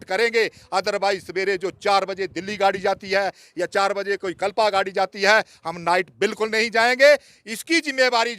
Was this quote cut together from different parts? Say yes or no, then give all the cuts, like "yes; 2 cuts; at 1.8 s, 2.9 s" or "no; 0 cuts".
no; 0 cuts